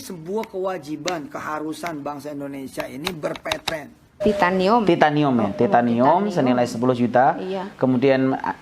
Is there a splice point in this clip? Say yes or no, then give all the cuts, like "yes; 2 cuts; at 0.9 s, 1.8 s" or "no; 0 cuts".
yes; 1 cut; at 4.2 s